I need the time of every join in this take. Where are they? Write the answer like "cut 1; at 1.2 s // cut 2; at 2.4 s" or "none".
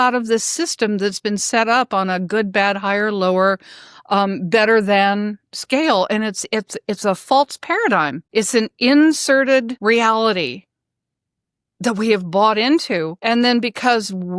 cut 1; at 8.2 s // cut 2; at 9.7 s // cut 3; at 13.1 s